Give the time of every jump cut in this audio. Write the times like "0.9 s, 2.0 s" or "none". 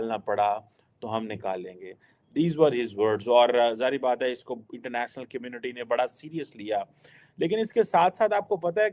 none